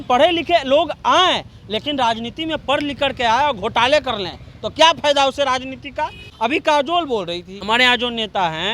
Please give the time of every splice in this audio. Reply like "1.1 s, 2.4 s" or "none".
6.2 s